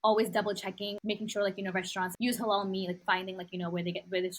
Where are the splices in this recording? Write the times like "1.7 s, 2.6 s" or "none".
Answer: 0.9 s, 2.1 s, 3.0 s